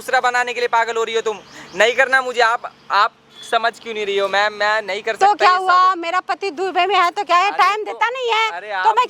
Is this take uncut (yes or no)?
yes